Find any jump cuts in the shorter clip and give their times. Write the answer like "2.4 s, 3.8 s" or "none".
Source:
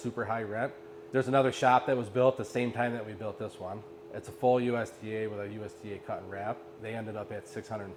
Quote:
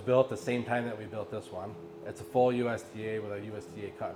none